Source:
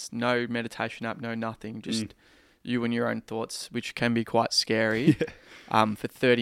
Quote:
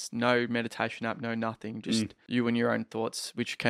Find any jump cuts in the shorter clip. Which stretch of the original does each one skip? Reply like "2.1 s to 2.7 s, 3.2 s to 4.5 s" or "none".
2.2 s to 2.5 s